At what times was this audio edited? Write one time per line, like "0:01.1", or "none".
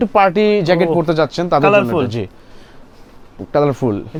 none